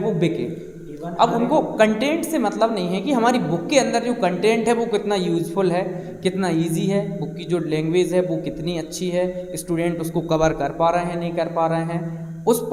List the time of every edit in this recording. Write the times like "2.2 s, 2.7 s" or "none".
none